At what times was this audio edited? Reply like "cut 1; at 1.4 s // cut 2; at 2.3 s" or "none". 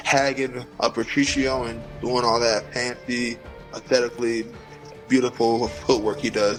none